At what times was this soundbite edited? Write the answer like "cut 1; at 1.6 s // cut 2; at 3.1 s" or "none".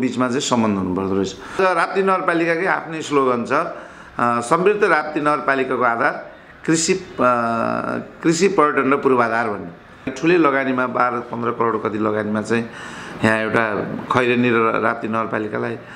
cut 1; at 1.6 s // cut 2; at 10.1 s